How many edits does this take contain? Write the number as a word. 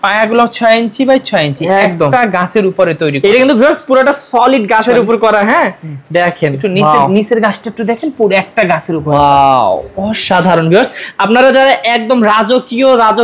zero